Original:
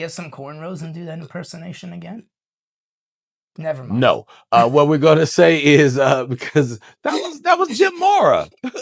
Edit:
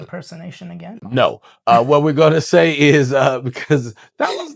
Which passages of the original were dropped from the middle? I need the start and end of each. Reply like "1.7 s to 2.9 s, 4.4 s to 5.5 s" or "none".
2.3 s to 4.0 s